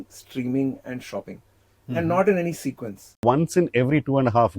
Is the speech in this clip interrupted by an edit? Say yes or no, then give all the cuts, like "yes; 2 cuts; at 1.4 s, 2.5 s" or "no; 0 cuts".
yes; 1 cut; at 3.2 s